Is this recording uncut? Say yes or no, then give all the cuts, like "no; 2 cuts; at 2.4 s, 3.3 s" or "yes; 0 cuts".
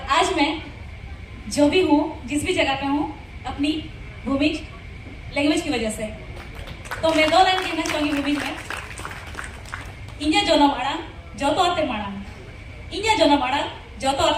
yes; 0 cuts